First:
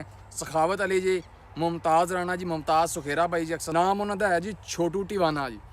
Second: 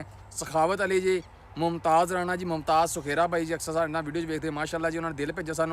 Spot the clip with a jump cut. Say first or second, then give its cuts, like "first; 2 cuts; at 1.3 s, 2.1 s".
first; 1 cut; at 3.6 s